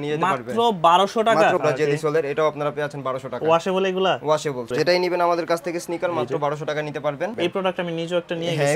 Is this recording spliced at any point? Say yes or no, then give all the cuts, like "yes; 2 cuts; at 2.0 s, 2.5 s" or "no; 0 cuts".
yes; 3 cuts; at 1.6 s, 4.7 s, 7.3 s